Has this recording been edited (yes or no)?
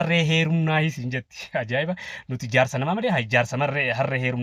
no